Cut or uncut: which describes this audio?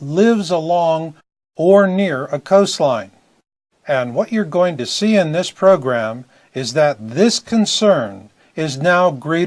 cut